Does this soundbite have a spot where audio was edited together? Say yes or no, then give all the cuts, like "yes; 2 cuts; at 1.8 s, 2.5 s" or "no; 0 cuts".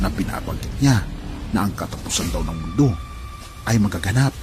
no; 0 cuts